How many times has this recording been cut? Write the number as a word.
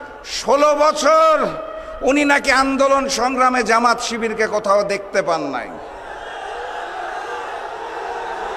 zero